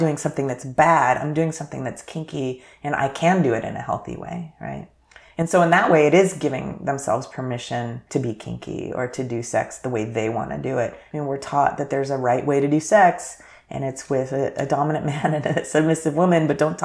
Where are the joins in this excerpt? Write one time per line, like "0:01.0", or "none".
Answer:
0:08.0
0:11.0